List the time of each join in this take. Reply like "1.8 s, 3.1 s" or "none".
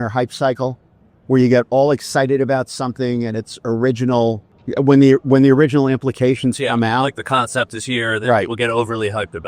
4.5 s